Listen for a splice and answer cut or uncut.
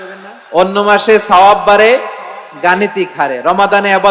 uncut